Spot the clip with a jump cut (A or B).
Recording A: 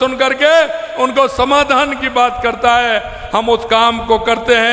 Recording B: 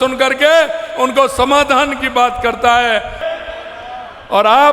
B